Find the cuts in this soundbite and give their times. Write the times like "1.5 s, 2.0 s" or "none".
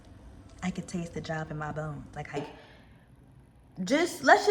2.4 s

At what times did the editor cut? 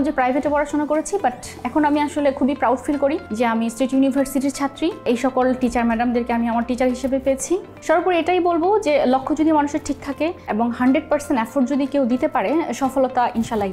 3.2 s, 5.0 s, 7.7 s, 10.4 s

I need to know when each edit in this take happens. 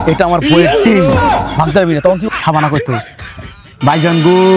2.2 s

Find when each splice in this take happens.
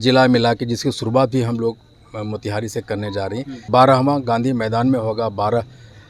3.6 s

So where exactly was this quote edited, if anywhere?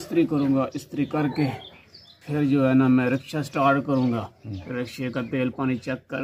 none

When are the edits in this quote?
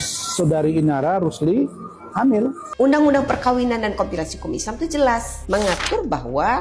2.6 s

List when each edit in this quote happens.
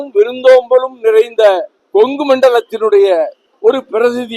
1.7 s, 3.4 s

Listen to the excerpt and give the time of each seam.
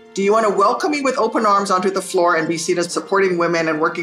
2.9 s

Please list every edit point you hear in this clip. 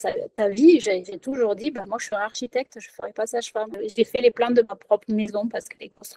3.7 s

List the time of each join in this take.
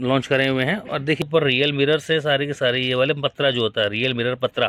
1.2 s

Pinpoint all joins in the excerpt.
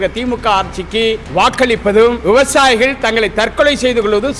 1.2 s, 2.2 s

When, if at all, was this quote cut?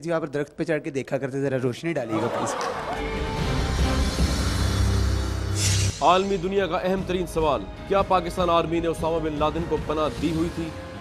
2.9 s, 5.5 s

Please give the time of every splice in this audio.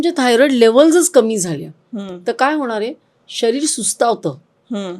none

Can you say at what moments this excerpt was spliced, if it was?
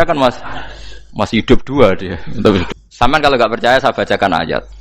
2.7 s

